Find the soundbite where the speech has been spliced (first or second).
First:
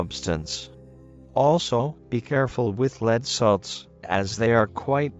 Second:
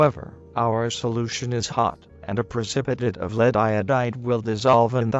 first